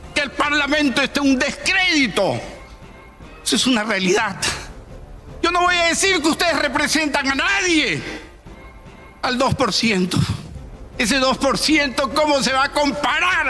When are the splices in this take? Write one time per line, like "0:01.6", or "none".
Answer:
none